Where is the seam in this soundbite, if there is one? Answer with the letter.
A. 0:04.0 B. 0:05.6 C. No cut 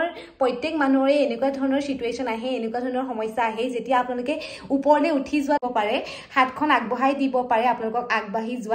B